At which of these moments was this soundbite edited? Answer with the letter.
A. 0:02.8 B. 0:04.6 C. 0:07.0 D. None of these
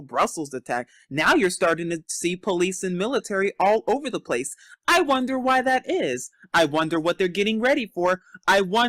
C